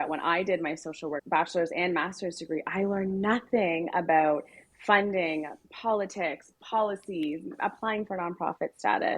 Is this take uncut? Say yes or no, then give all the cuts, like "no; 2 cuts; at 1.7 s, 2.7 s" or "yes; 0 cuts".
no; 1 cut; at 1.2 s